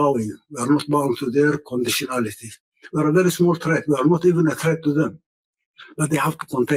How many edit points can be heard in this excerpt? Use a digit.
0